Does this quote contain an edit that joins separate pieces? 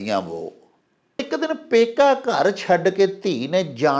yes; 1 cut; at 1.2 s

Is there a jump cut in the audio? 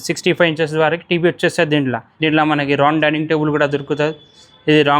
yes; 1 cut; at 2.1 s

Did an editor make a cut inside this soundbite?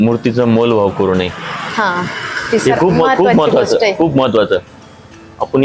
no; 0 cuts

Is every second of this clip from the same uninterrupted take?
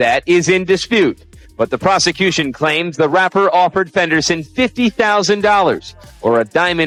yes; 0 cuts

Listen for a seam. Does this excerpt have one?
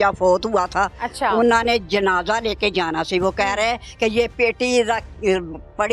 yes; 1 cut; at 1.0 s

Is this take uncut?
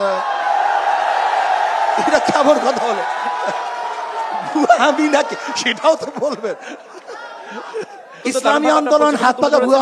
no; 1 cut; at 8.2 s

